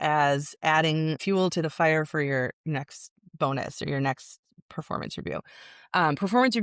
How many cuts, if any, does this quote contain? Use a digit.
1